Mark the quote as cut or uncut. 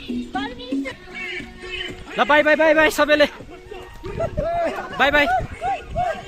cut